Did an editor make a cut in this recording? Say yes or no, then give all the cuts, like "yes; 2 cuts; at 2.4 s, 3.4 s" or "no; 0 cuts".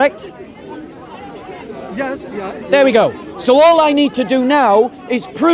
no; 0 cuts